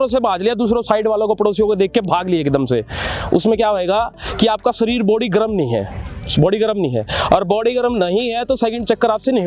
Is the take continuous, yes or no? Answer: yes